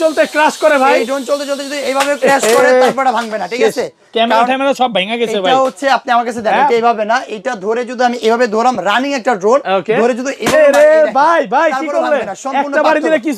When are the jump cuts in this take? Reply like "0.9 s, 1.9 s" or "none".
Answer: none